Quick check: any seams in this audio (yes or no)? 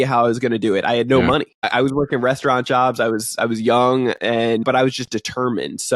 yes